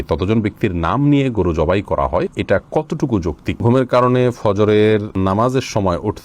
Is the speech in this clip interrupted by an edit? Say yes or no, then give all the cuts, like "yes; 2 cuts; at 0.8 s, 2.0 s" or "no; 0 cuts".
yes; 3 cuts; at 2.3 s, 3.6 s, 5.1 s